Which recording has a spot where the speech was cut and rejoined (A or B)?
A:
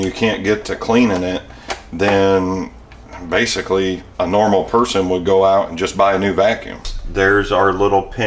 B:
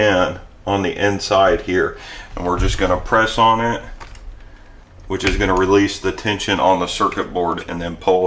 A